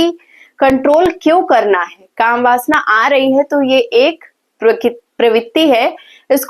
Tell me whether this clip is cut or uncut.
uncut